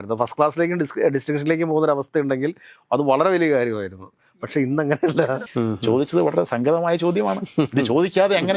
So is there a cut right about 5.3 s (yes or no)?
yes